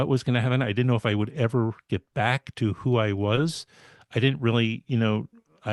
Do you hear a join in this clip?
no; 0 cuts

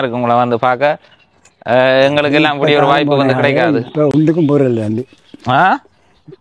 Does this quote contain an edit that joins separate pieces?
no; 0 cuts

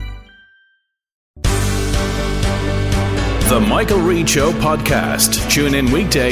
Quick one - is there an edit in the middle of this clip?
yes; 1 cut; at 1.4 s

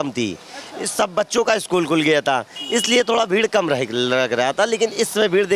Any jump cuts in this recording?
no; 0 cuts

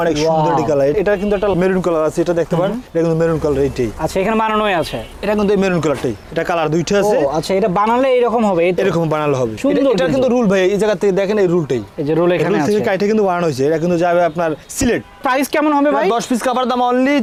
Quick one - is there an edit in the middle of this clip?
no; 0 cuts

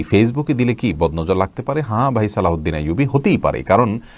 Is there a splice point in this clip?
no; 0 cuts

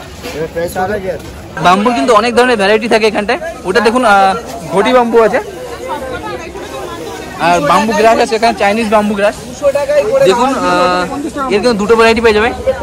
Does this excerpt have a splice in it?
yes; 1 cut; at 1.6 s

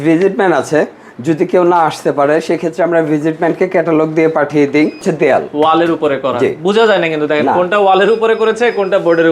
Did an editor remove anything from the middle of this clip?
yes; 1 cut; at 5.0 s

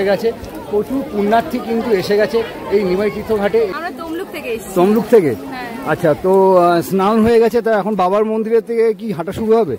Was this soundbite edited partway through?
yes; 1 cut; at 3.7 s

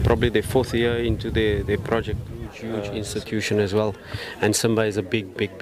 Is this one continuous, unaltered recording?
no; 1 cut; at 2.7 s

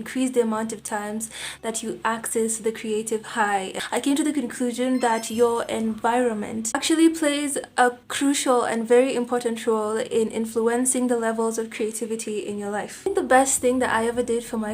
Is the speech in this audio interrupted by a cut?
yes; 2 cuts; at 3.8 s, 13.1 s

